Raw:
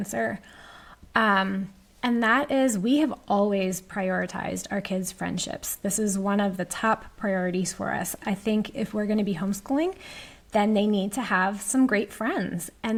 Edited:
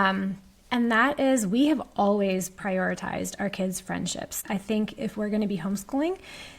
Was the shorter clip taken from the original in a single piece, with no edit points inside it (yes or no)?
no